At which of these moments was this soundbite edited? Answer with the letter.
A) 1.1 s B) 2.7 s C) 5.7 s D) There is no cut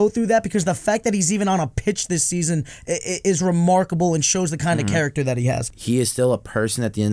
C